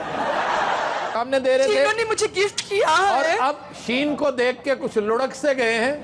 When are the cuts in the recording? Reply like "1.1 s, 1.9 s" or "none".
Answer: 1.1 s